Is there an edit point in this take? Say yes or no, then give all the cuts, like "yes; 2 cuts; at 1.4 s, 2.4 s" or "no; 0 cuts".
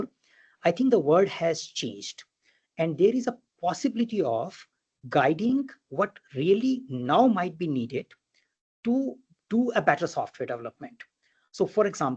no; 0 cuts